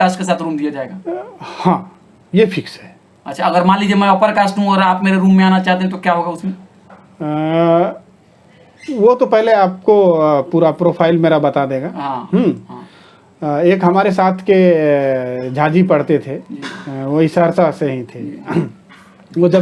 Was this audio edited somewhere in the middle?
no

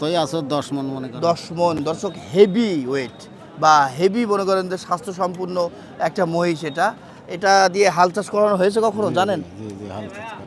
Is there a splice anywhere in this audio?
no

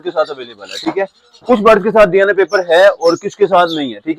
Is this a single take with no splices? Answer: yes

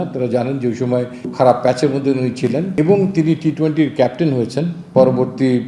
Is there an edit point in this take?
yes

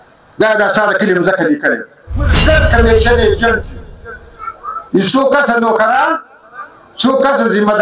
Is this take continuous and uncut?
no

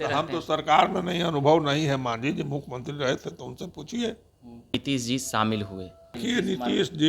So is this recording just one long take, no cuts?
no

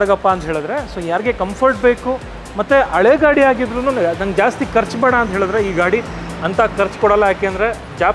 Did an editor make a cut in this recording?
no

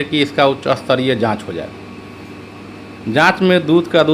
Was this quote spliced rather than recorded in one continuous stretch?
no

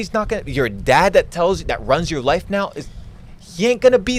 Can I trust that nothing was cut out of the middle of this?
yes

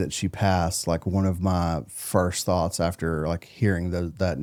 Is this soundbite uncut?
yes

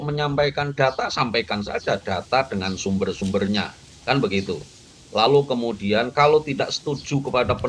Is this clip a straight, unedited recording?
yes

